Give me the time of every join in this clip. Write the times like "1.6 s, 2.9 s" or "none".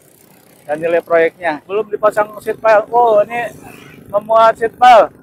1.7 s